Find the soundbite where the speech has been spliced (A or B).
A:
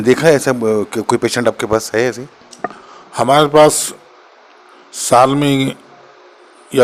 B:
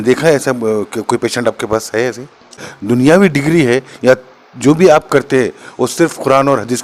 B